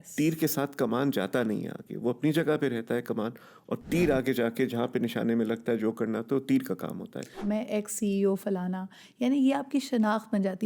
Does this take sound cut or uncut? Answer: cut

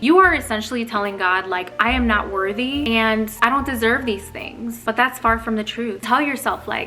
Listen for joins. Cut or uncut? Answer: uncut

